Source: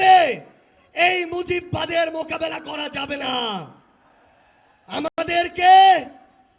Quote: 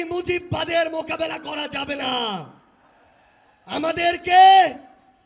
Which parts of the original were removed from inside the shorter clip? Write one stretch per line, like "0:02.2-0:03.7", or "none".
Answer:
0:05.1-0:05.2